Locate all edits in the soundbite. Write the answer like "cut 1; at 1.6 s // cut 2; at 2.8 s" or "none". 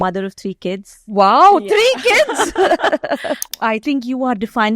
cut 1; at 3.5 s